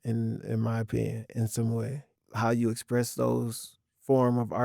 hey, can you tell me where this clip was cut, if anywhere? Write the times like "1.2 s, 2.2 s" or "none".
2.0 s